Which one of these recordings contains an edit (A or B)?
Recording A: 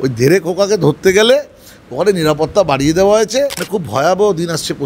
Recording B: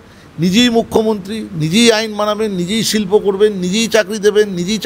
A